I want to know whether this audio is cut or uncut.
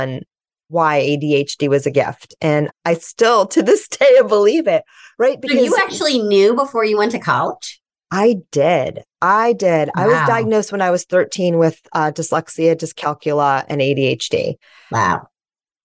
uncut